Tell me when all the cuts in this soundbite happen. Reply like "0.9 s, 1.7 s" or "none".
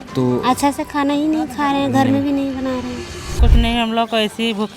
3.4 s